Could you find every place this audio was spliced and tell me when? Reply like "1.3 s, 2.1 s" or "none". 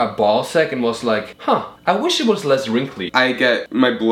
1.4 s, 3.2 s